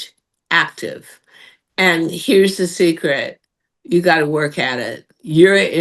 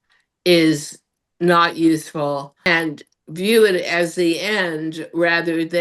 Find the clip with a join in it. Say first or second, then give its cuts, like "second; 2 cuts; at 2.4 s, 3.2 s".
second; 1 cut; at 2.5 s